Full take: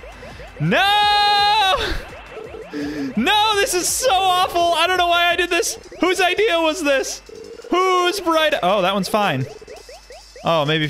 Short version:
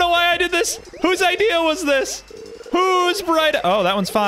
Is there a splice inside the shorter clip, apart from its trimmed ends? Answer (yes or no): no